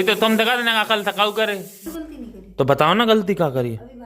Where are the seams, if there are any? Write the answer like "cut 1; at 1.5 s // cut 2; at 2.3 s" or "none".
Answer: cut 1; at 1.9 s